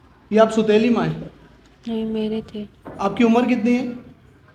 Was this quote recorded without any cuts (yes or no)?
yes